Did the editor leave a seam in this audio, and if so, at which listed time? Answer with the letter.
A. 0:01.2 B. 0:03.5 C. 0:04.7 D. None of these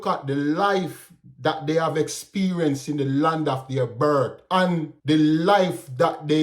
C